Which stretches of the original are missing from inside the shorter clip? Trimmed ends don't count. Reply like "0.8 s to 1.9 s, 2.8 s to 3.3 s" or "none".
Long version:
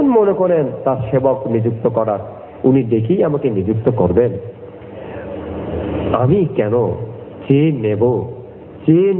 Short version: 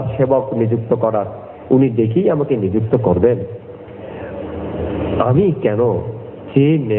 none